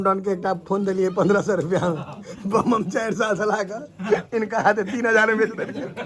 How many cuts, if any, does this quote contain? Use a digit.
0